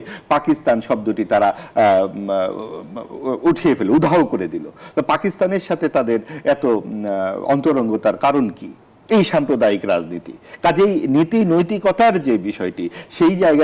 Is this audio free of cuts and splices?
yes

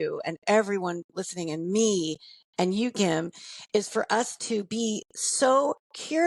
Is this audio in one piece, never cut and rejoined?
yes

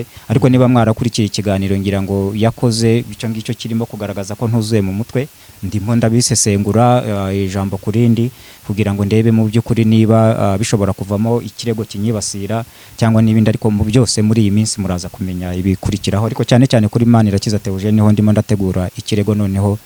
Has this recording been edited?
no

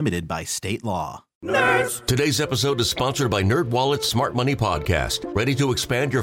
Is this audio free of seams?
no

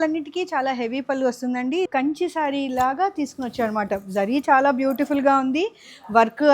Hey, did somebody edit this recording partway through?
yes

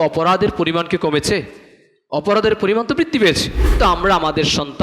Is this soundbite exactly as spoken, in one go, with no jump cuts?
no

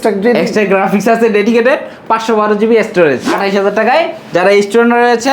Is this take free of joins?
no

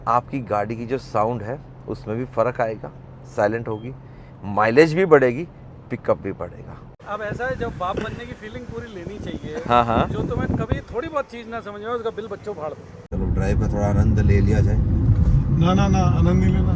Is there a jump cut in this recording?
yes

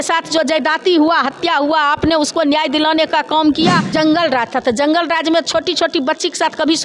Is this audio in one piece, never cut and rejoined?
no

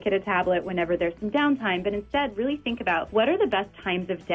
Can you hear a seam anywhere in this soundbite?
yes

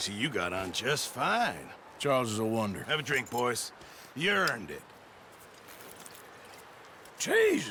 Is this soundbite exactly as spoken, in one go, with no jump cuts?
yes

